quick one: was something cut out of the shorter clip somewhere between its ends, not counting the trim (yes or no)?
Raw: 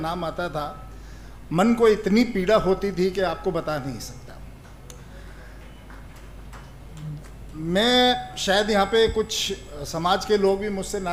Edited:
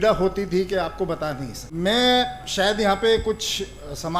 yes